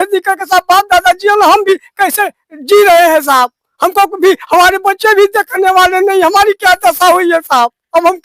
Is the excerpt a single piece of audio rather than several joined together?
yes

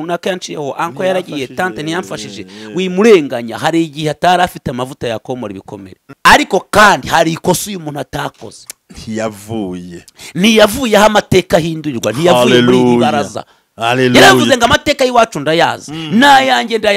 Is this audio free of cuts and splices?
no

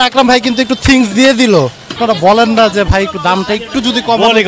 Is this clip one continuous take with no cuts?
no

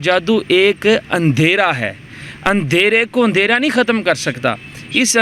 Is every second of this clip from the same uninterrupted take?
yes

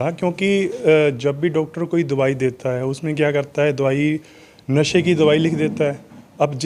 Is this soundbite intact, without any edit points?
yes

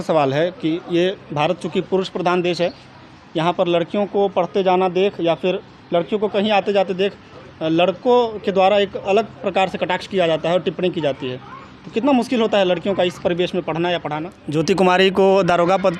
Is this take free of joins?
no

